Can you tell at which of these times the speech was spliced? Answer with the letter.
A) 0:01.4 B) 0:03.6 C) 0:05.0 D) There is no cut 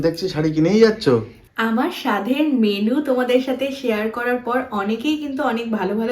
A